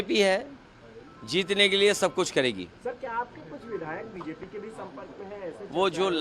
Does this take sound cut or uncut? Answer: uncut